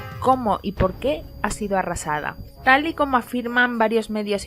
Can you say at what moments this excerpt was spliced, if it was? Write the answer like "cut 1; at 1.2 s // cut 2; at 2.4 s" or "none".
cut 1; at 1.3 s